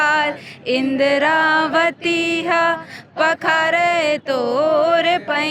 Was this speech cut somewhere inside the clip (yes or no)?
no